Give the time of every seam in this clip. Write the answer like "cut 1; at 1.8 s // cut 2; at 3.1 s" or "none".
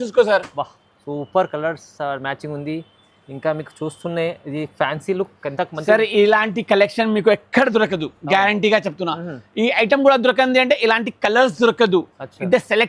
none